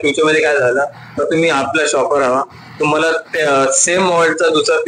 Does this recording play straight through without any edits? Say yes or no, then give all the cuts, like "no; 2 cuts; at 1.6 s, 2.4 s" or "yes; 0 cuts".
yes; 0 cuts